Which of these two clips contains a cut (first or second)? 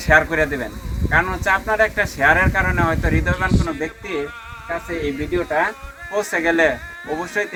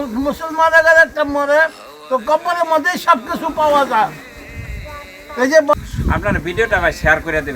second